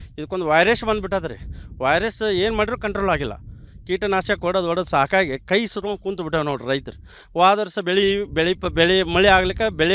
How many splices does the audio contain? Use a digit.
0